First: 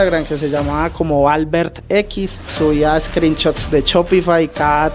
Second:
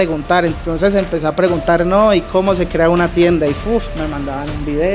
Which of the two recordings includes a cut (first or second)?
first